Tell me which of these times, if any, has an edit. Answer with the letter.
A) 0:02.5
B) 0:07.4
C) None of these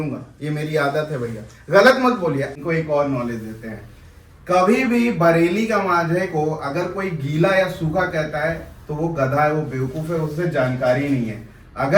A